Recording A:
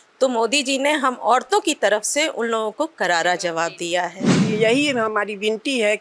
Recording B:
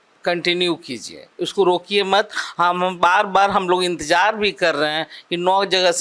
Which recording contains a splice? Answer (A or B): A